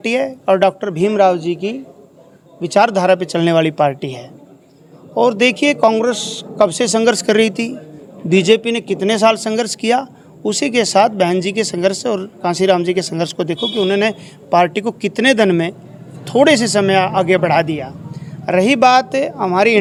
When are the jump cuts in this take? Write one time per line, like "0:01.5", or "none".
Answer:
none